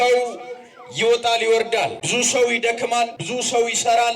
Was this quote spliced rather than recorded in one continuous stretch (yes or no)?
yes